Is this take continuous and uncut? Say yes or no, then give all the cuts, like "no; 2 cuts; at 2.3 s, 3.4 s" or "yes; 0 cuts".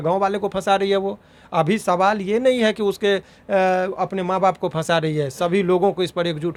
yes; 0 cuts